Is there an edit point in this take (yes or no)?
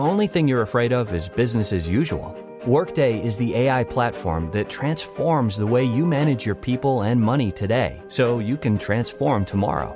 no